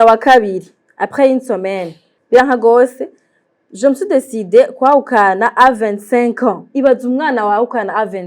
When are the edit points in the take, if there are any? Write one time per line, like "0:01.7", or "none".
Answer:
0:02.1